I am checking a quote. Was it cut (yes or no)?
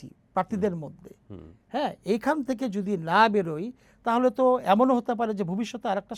no